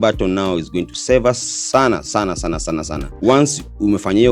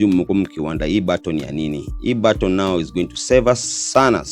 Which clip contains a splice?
first; 1 cut; at 3.1 s

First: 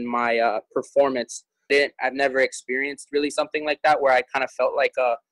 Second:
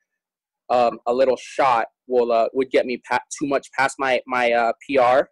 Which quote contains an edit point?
first; 1 cut; at 1.7 s

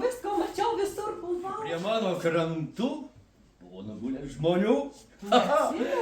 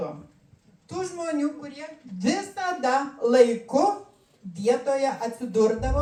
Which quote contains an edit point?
first; 1 cut; at 1.7 s

